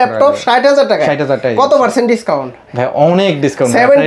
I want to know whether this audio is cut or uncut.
uncut